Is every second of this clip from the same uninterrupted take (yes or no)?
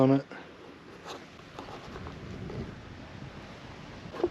no